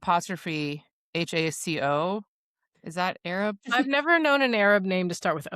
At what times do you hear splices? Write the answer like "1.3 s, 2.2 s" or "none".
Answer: 3.7 s